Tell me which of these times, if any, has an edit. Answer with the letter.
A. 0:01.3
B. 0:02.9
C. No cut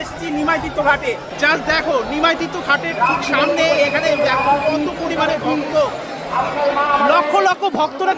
A